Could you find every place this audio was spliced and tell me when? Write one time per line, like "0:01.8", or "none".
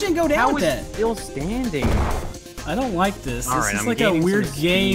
0:02.2